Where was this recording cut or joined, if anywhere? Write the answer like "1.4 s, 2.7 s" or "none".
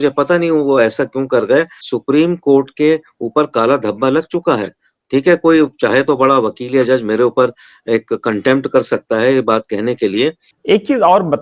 1.7 s, 10.5 s